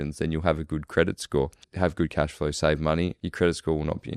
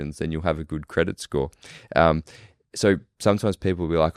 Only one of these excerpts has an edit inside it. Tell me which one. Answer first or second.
first